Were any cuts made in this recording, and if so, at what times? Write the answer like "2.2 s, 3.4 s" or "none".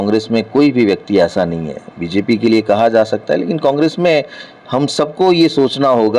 none